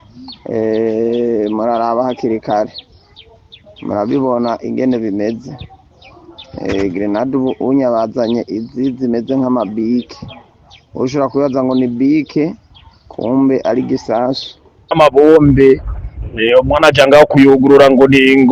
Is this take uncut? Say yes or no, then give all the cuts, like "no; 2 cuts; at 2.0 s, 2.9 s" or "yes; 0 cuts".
no; 1 cut; at 14.9 s